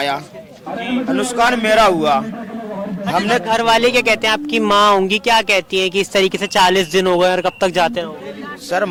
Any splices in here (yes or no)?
no